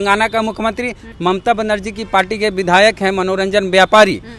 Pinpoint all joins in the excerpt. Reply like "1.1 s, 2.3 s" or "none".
1.0 s